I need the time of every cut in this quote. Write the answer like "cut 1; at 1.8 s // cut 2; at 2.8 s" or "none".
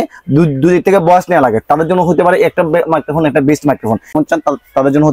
cut 1; at 4.1 s